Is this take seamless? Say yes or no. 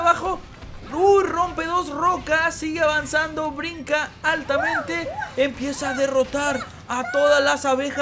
yes